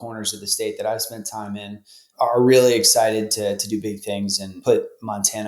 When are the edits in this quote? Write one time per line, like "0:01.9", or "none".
0:04.5